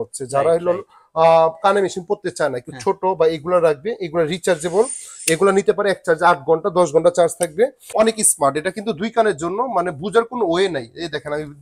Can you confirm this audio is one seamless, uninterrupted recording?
no; 1 cut; at 7.8 s

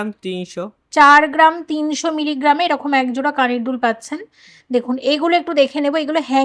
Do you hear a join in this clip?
no; 0 cuts

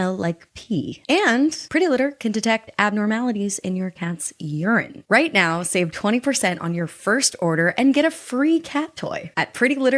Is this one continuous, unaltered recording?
no; 3 cuts; at 1.0 s, 1.6 s, 4.9 s

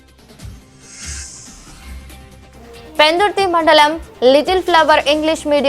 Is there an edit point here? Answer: yes; 1 cut; at 1.6 s

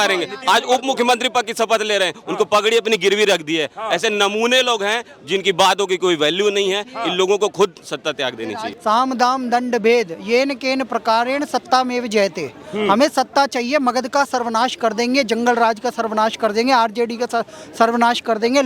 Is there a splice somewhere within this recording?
yes; 1 cut; at 8.6 s

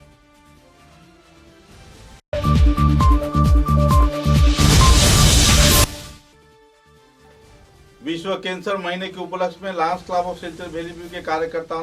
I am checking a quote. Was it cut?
yes; 2 cuts; at 2.1 s, 5.9 s

